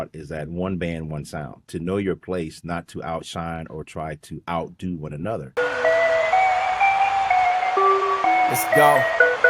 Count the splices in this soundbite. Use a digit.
2